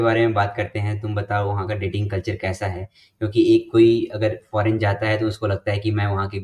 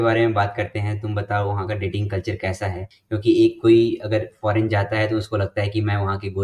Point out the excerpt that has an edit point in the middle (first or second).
second